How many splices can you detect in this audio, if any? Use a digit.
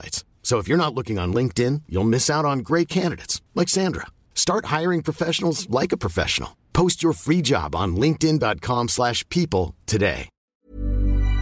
1